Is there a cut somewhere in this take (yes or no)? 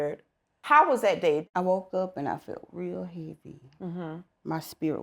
yes